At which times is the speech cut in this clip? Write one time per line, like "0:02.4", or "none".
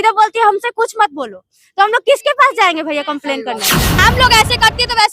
0:04.0